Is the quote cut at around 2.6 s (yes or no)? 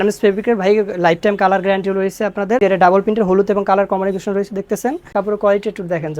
yes